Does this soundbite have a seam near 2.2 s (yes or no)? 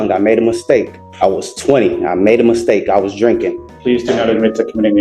no